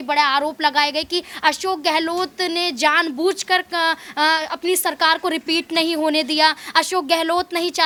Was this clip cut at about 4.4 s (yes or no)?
no